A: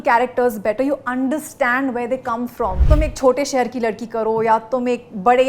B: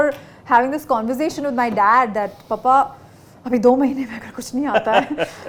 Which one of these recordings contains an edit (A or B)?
A